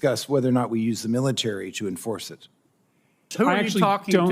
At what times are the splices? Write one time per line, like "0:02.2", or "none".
0:03.2